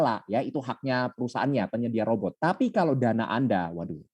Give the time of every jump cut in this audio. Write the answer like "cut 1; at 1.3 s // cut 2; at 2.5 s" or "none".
cut 1; at 2.3 s